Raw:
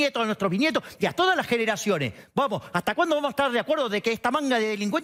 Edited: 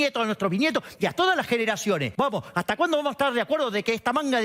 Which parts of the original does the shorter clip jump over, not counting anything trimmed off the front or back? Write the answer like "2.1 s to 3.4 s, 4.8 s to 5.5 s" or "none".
2.1 s to 2.3 s